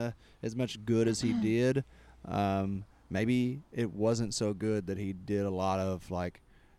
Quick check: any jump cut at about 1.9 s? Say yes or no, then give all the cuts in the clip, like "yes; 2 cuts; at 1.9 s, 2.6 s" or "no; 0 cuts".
no; 0 cuts